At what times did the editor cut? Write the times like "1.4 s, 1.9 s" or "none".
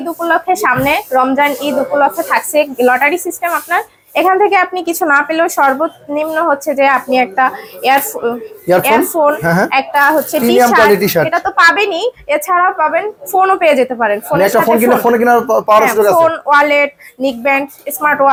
none